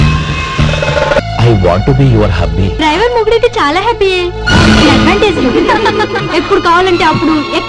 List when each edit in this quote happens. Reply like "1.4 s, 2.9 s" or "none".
1.2 s, 2.7 s

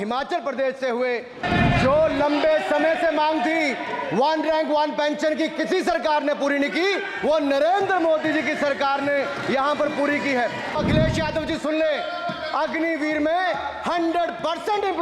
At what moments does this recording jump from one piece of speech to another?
1.4 s, 10.8 s

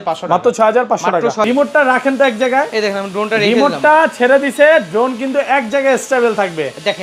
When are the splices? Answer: 1.4 s

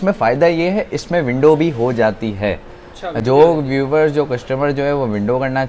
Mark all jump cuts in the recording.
none

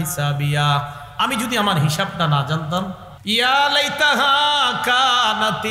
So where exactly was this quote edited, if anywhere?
3.1 s

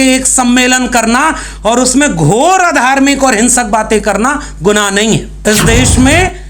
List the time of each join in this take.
5.3 s

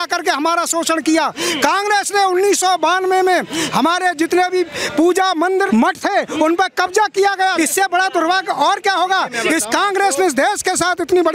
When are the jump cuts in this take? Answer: 5.7 s, 7.5 s

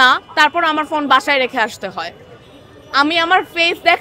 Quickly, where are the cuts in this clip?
none

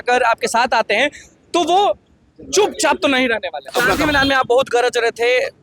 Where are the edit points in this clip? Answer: 3.7 s

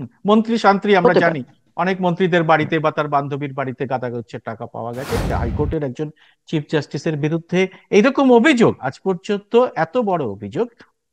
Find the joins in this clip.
5.3 s

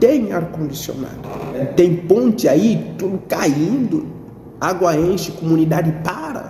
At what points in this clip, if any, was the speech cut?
1.6 s

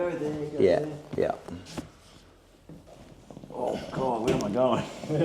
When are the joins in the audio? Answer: 2.9 s

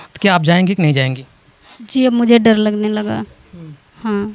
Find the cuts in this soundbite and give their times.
none

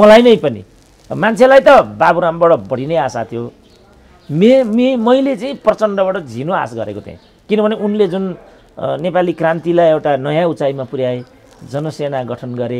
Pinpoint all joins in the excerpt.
none

